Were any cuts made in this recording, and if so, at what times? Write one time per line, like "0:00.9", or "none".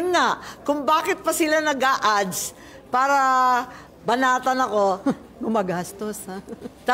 none